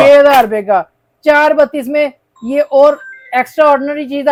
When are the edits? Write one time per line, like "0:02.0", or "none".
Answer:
none